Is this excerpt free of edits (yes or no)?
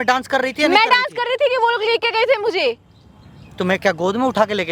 yes